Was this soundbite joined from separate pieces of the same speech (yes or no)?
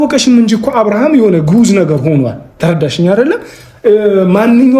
no